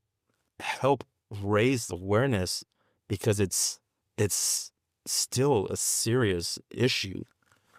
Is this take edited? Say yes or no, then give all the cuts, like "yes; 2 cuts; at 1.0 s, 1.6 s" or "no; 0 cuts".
no; 0 cuts